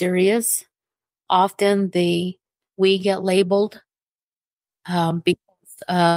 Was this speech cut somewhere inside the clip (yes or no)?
yes